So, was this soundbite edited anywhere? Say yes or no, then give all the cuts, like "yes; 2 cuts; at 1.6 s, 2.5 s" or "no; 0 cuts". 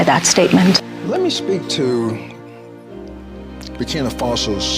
yes; 2 cuts; at 2.4 s, 3.8 s